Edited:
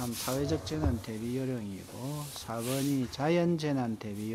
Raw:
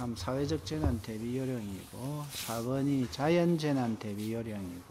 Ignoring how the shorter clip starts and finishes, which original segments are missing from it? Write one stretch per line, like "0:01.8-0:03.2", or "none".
none

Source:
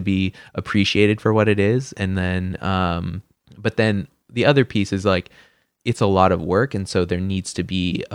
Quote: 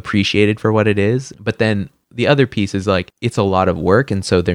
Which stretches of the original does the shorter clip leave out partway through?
0:01.9-0:03.5
0:05.3-0:05.8

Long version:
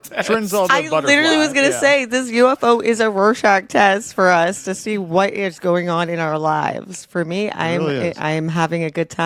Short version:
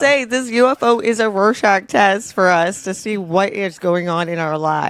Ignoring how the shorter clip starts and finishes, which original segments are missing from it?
none

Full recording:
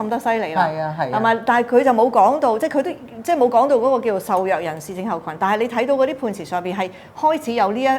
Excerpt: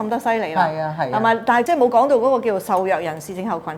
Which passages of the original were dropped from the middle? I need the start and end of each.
0:01.7-0:03.3

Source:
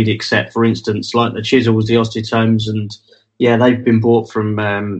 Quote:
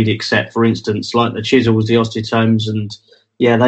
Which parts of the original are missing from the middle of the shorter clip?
none

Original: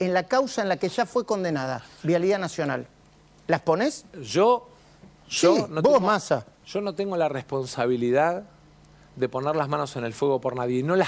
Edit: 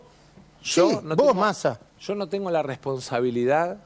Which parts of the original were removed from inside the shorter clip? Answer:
none

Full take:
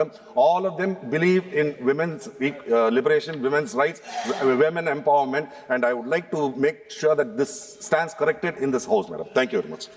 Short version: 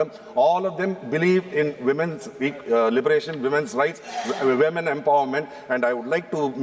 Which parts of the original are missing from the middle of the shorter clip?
none

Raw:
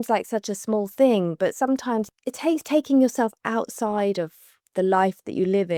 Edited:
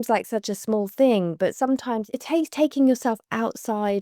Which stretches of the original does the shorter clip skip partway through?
0:02.1-0:02.2

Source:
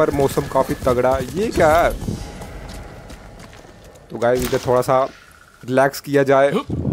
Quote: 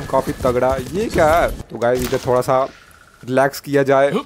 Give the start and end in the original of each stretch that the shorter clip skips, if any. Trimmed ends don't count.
0:02.1-0:04.0

